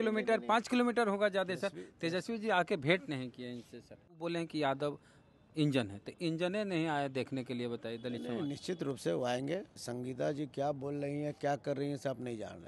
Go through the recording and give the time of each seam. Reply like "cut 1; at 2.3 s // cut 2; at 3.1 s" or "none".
cut 1; at 4.1 s // cut 2; at 9.8 s